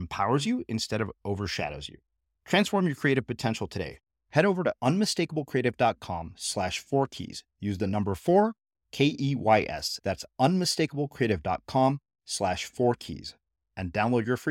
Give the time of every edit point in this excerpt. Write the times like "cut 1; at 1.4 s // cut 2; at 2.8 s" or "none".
none